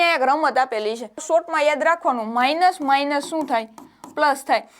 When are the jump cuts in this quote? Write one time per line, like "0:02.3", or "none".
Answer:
0:01.2